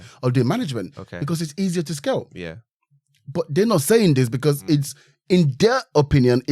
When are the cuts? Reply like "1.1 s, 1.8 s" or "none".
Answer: none